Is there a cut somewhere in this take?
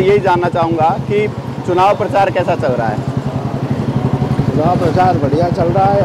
no; 0 cuts

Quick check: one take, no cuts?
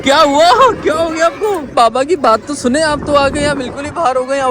no; 1 cut; at 1.7 s

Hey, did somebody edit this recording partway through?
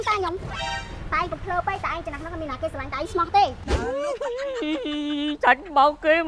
yes; 1 cut; at 3.6 s

